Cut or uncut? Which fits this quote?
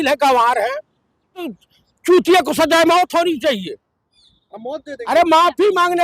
cut